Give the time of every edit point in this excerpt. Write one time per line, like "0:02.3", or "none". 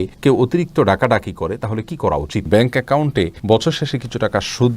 0:02.5